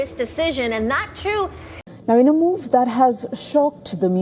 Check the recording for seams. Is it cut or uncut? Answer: cut